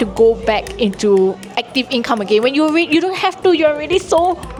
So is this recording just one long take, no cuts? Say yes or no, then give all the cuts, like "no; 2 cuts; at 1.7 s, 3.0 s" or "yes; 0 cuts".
yes; 0 cuts